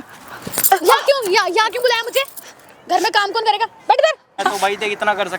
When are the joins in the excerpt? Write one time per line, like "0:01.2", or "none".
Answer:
0:04.4